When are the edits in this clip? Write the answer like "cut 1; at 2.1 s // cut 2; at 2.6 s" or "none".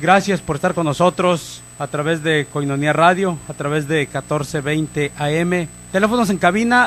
cut 1; at 3.1 s